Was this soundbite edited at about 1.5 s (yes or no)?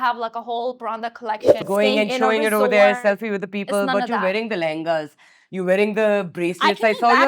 yes